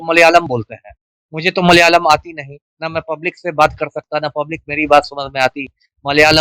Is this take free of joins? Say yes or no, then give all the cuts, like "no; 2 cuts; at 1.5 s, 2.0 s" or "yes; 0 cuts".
yes; 0 cuts